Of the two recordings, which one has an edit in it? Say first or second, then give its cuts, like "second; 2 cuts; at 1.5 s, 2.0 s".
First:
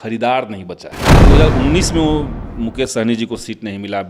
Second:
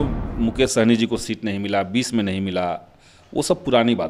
first; 1 cut; at 1.2 s